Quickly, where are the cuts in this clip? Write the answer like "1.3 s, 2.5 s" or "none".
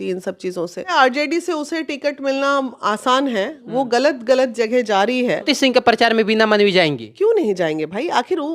0.9 s, 5.4 s